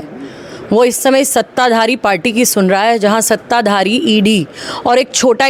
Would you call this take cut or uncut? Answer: uncut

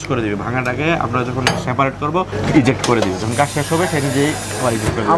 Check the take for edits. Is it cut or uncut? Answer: cut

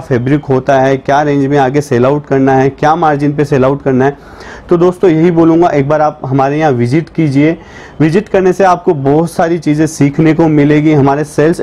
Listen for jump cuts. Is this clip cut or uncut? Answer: uncut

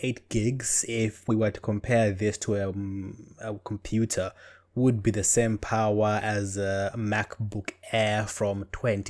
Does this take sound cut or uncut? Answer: uncut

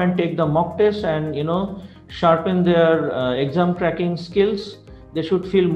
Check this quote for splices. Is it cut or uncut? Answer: uncut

